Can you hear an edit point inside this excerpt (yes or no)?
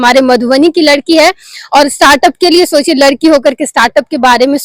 no